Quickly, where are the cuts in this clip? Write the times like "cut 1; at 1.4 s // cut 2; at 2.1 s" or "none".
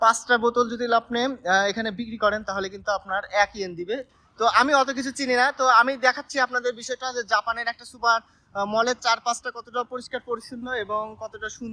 cut 1; at 4.3 s